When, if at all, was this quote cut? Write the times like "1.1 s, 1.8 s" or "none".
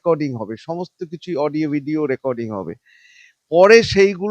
none